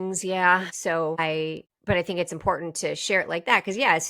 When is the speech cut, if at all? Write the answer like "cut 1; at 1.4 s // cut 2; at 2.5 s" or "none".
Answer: cut 1; at 1.2 s